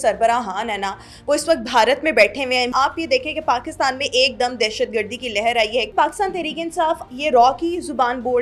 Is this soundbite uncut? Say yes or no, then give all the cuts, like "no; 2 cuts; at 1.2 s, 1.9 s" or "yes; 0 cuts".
no; 3 cuts; at 2.7 s, 5.9 s, 7.0 s